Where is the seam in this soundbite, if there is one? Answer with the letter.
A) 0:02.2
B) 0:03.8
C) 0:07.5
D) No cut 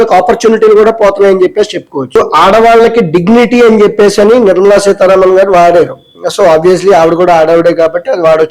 A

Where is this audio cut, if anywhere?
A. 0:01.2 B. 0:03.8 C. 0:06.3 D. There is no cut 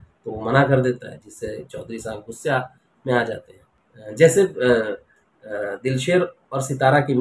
B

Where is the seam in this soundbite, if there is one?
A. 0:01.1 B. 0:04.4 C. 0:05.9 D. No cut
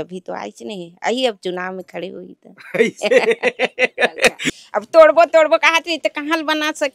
B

